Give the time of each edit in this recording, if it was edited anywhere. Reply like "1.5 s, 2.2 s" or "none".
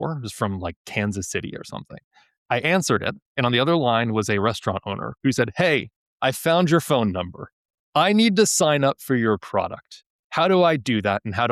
none